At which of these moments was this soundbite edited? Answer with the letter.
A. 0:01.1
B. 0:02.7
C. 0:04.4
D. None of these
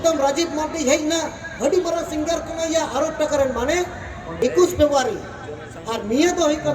C